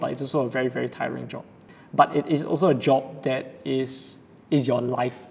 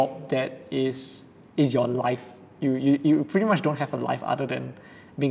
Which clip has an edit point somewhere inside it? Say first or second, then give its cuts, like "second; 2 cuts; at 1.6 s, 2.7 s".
first; 1 cut; at 1.8 s